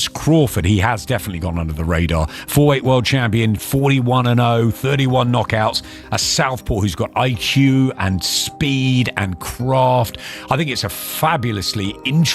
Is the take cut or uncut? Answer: uncut